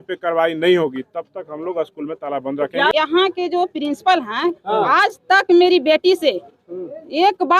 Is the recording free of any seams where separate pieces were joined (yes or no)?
no